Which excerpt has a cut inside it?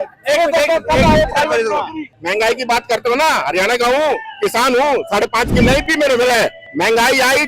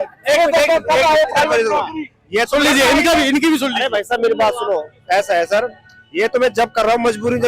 first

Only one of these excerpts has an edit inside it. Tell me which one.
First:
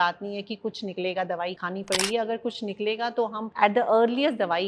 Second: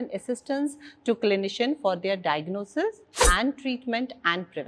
first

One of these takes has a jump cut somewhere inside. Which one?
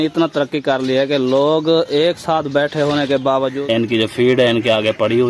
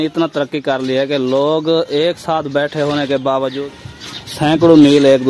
first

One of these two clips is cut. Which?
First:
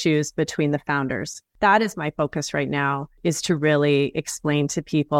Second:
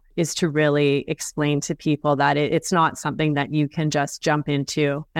first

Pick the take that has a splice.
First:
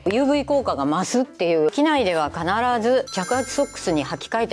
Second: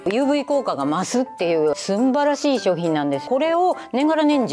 first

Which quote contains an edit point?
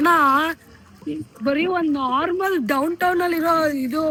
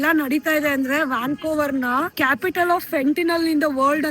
second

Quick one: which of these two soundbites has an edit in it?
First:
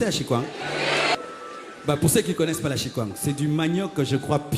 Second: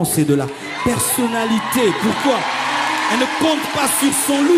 first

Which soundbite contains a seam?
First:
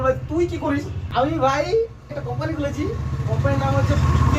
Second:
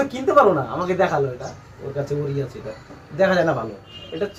first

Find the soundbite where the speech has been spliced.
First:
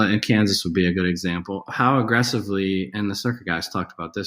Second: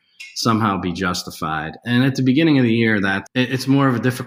first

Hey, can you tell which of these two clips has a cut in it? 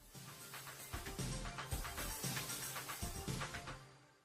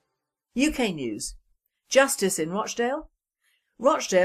second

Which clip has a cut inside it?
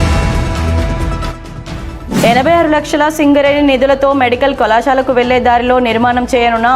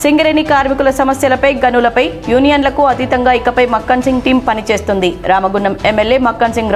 first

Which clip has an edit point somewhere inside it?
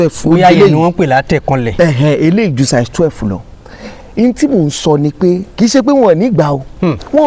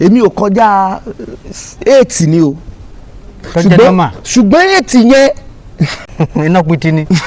second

